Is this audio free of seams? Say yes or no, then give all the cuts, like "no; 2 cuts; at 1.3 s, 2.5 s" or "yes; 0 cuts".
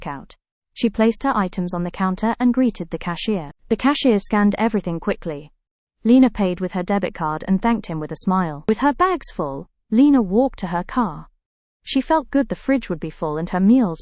no; 1 cut; at 8.6 s